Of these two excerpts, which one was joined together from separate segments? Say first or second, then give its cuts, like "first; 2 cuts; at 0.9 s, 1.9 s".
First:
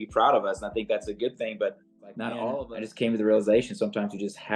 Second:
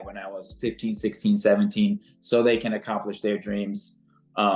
first; 1 cut; at 2.7 s